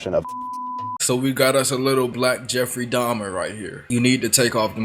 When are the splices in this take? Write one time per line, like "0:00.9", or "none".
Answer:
0:00.9
0:03.8

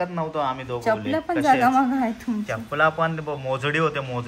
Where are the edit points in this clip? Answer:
none

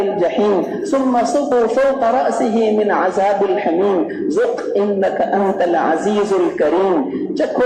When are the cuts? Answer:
0:01.5

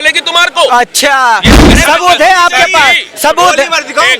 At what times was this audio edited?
0:01.7

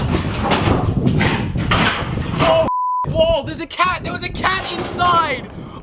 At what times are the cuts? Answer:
none

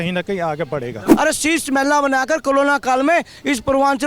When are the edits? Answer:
0:01.1

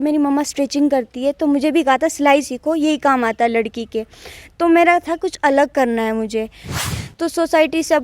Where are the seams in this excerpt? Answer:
0:06.9

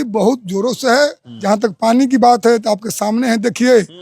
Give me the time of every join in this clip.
0:01.3

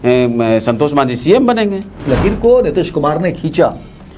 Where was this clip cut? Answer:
0:02.0

